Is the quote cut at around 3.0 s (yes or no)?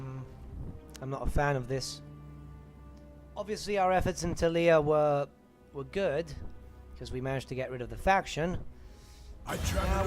yes